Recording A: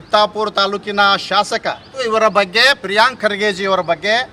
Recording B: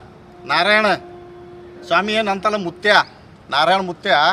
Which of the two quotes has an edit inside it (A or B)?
A